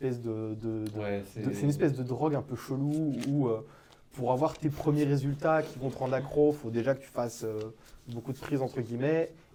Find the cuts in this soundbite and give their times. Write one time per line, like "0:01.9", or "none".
none